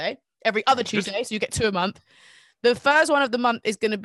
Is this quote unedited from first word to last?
yes; 0 cuts

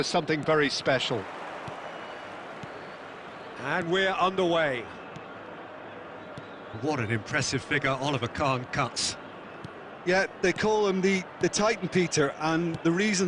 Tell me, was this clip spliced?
yes; 1 cut; at 1.6 s

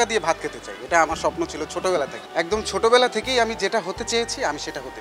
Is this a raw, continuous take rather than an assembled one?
no; 1 cut; at 2.2 s

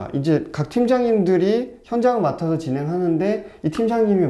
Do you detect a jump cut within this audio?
no; 0 cuts

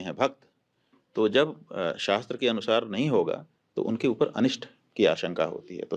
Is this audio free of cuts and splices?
yes; 0 cuts

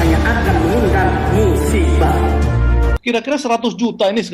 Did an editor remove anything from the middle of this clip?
yes; 1 cut; at 2.9 s

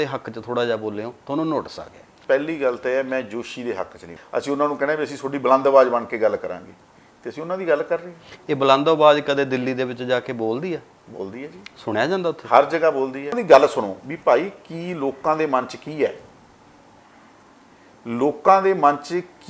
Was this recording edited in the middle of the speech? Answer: yes; 3 cuts; at 2.1 s, 4.2 s, 13.4 s

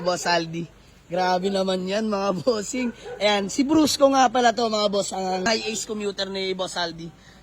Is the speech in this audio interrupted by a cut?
yes; 1 cut; at 5.5 s

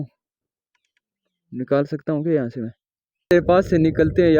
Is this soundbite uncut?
no; 1 cut; at 3.3 s

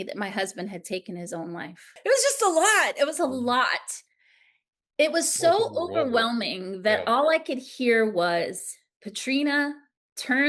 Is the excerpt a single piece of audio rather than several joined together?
no; 1 cut; at 1.9 s

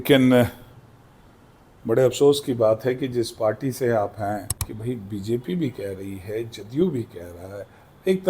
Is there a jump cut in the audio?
yes; 1 cut; at 4.6 s

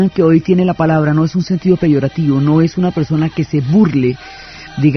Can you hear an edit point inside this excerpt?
no; 0 cuts

